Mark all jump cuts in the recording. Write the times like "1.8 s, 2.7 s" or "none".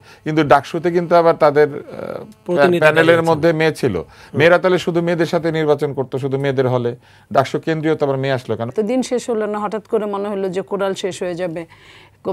8.7 s